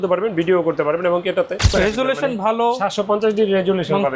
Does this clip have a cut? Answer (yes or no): yes